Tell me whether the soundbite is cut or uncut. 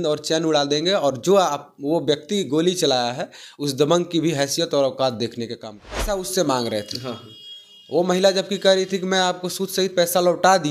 cut